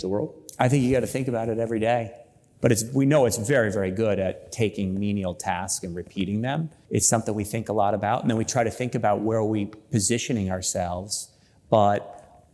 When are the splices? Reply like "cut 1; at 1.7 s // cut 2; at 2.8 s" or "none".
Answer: cut 1; at 2.4 s // cut 2; at 6.7 s